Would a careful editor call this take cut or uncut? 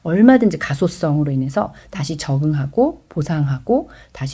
uncut